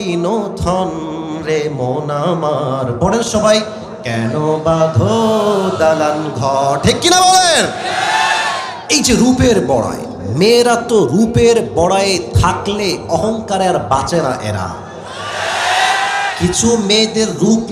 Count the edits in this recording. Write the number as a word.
one